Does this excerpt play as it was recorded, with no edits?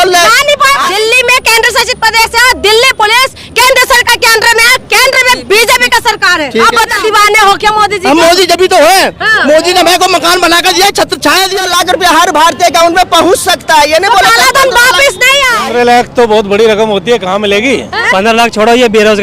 no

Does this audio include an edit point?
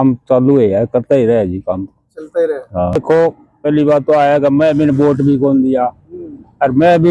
yes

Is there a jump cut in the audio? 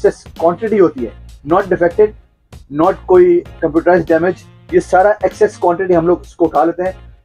no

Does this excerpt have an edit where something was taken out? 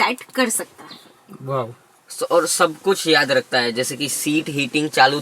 no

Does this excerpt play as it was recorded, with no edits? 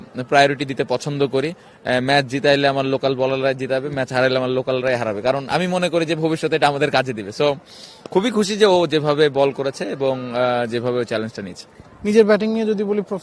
yes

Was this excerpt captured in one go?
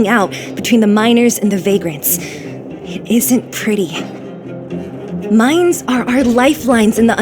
no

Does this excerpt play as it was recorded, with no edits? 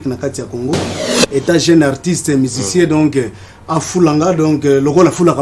no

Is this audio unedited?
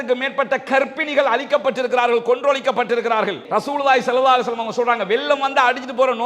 no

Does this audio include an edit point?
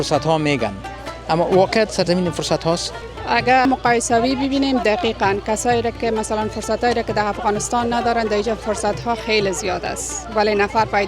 yes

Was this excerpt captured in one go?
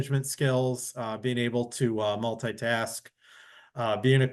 yes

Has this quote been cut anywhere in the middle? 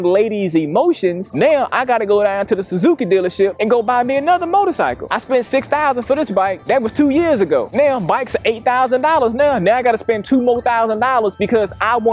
no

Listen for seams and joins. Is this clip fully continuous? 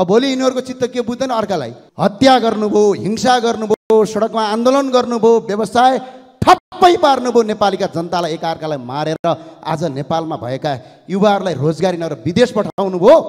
no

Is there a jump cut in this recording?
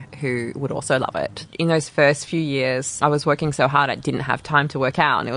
yes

